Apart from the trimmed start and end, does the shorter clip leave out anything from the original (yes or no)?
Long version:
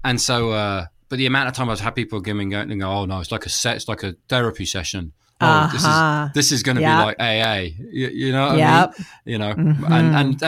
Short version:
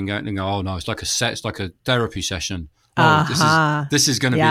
no